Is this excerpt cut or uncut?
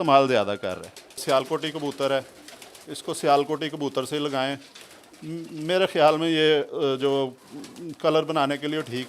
cut